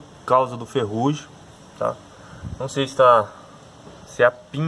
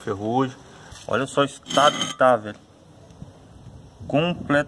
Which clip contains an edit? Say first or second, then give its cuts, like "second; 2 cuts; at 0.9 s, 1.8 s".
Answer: second; 1 cut; at 0.9 s